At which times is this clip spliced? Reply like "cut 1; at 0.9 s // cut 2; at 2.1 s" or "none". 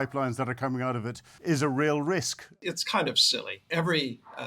cut 1; at 1.2 s // cut 2; at 2.6 s // cut 3; at 3.7 s

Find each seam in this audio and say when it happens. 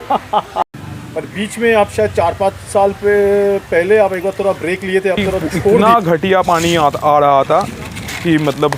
cut 1; at 1.0 s // cut 2; at 5.8 s

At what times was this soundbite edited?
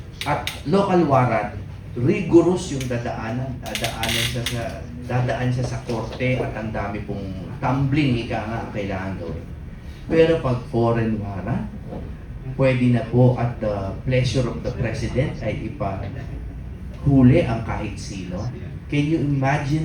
none

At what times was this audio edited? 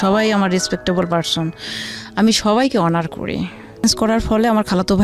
cut 1; at 3.8 s

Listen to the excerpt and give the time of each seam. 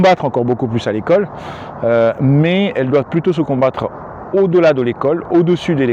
none

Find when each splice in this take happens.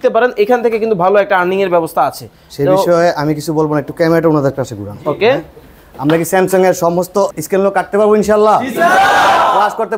cut 1; at 7.3 s

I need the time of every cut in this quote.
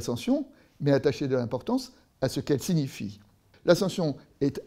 cut 1; at 3.5 s

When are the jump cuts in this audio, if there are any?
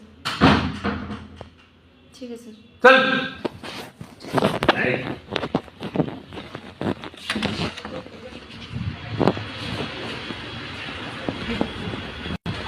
none

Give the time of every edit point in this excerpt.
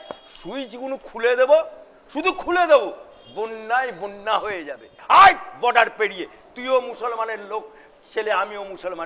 cut 1; at 5.0 s

